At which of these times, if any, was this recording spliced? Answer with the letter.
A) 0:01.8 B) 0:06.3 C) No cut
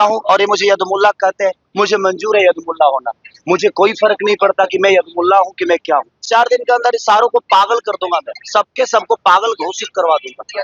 B